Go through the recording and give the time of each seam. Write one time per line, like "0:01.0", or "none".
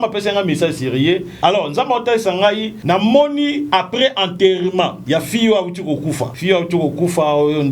0:01.3
0:02.7
0:05.0
0:06.3

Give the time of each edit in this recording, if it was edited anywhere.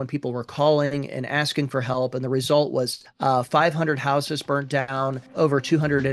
0:03.0
0:05.3

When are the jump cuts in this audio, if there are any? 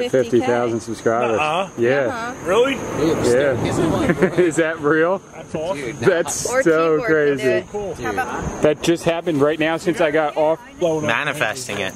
0:08.3
0:10.7

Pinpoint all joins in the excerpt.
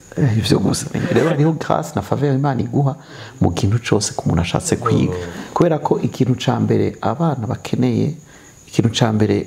0:00.9
0:05.4

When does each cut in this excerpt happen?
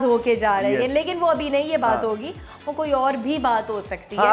none

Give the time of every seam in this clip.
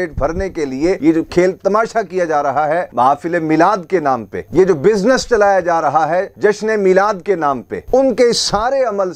0:01.0
0:02.9
0:07.8

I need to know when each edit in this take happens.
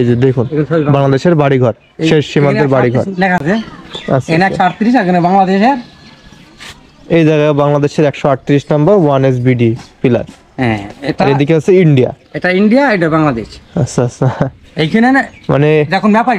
none

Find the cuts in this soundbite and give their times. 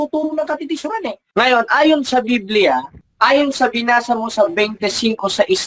0:01.3
0:03.0

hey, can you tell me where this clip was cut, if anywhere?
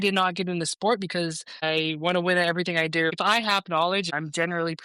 0:01.6
0:03.1
0:04.1

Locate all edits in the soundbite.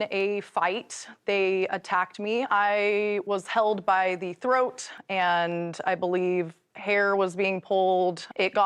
none

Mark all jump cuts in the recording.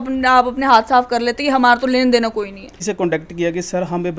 0:02.8

